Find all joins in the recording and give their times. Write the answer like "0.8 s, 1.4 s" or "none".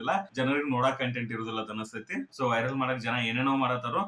2.3 s